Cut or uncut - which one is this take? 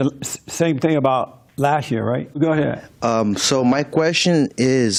uncut